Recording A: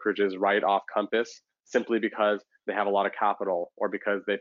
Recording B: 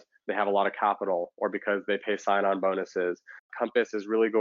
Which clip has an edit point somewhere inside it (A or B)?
B